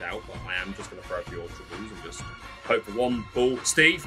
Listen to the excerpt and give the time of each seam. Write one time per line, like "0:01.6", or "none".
none